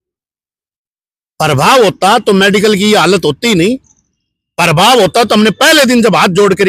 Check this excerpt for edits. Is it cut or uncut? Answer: uncut